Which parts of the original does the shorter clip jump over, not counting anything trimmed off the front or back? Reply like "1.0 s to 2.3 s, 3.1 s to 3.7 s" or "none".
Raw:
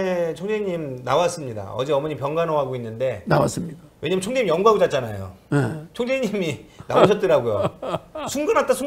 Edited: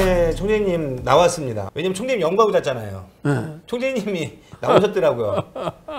1.6 s to 3.8 s

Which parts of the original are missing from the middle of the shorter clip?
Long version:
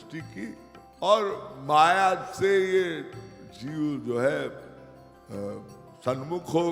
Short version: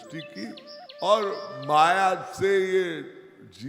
none

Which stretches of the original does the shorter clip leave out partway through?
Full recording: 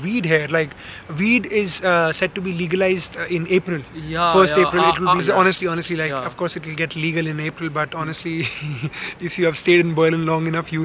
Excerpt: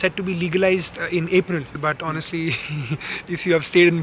3.9 s to 7.6 s

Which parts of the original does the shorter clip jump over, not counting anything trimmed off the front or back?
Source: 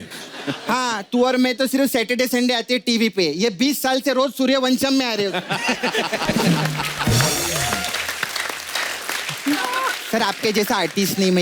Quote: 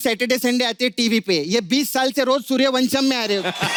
none

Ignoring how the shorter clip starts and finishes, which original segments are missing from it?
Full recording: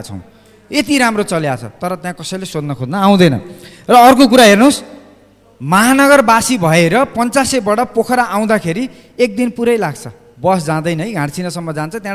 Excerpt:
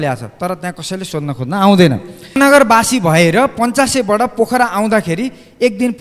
3.8 s to 5.9 s

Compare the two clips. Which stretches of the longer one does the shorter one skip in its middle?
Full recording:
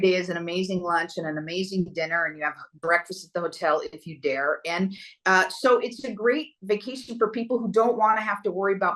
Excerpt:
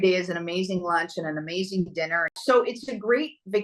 2.4 s to 5.5 s

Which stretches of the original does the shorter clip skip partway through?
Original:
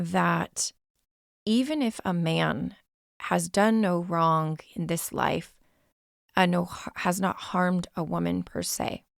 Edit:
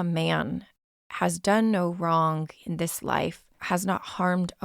5.6 s to 6.8 s

